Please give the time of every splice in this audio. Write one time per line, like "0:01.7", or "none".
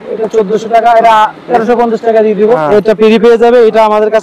0:02.6